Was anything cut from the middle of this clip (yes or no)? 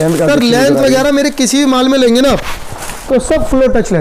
no